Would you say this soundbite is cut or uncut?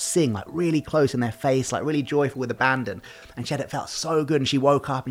uncut